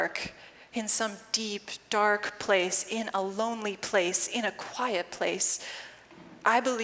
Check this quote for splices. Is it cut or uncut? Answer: uncut